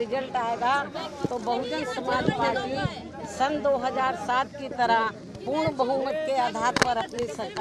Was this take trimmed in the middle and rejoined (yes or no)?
no